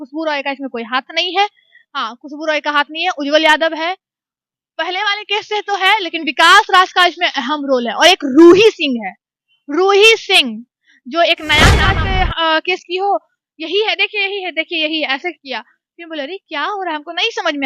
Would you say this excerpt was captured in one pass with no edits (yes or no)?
no